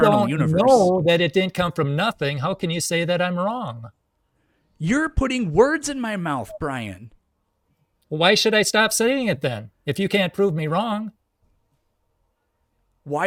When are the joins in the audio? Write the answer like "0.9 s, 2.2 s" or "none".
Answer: none